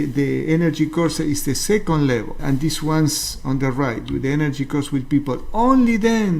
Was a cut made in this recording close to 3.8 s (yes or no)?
no